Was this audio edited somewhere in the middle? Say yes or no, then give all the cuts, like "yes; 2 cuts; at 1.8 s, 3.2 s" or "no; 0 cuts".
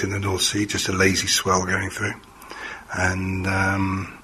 no; 0 cuts